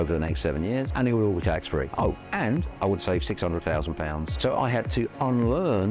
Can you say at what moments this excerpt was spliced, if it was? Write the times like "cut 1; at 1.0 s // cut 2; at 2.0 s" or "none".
cut 1; at 4.3 s